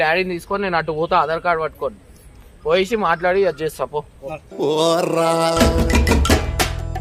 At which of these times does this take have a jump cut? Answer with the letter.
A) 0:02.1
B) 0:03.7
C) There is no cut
C